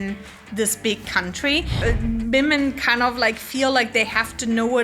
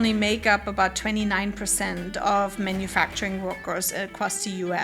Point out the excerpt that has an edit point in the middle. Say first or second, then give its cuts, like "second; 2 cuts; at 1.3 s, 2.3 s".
first; 1 cut; at 1.8 s